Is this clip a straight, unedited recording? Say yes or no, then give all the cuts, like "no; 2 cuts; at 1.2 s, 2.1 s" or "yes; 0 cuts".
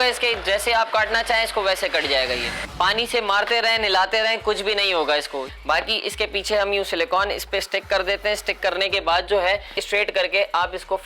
no; 3 cuts; at 2.6 s, 5.4 s, 9.8 s